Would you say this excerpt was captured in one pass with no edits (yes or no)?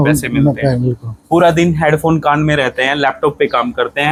yes